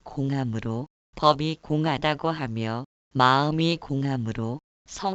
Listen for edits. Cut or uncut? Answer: uncut